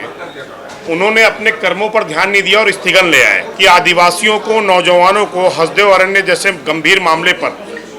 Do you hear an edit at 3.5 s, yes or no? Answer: yes